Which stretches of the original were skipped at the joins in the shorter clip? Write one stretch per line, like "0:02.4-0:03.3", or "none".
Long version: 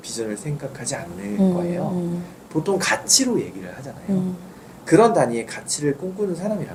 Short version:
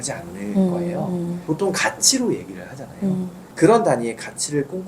0:02.2-0:02.4
0:04.5-0:04.7